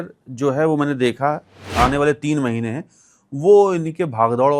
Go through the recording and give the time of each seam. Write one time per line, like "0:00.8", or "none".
0:01.6